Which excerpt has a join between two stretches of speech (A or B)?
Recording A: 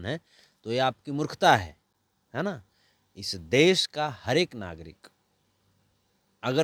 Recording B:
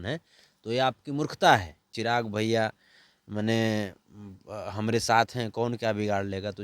B